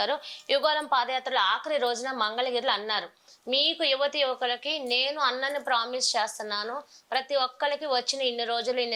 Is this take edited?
no; 0 cuts

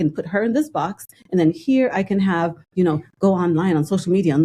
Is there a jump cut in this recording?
no; 0 cuts

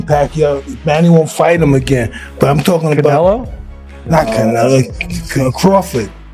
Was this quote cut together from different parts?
no; 0 cuts

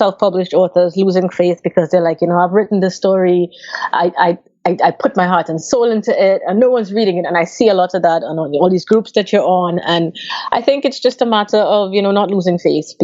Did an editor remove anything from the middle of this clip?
no; 0 cuts

